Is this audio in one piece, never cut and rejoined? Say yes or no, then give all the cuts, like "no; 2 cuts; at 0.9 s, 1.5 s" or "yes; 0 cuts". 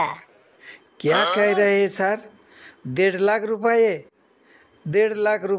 yes; 0 cuts